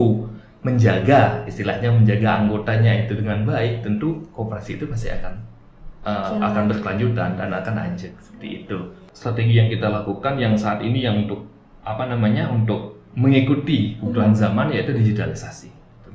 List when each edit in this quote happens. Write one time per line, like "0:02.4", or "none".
0:09.1